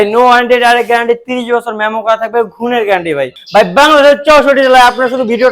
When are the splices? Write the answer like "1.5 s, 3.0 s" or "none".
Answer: 3.4 s